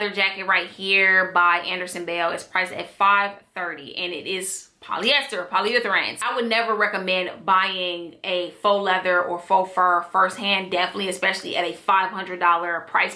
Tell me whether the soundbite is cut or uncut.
uncut